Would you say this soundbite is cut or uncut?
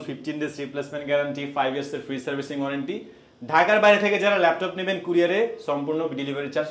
uncut